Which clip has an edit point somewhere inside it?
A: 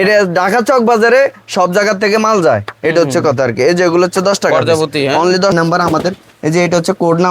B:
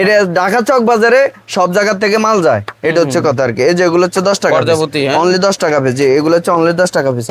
A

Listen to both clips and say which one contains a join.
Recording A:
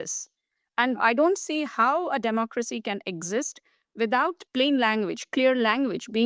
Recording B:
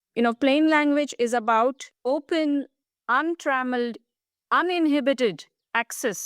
B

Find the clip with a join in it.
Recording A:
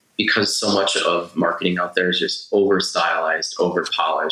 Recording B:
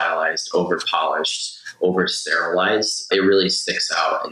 B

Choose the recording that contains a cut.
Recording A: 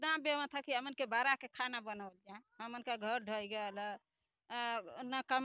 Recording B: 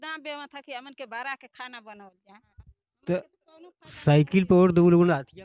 B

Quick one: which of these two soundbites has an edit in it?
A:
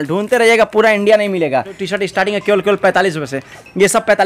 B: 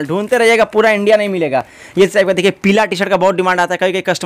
A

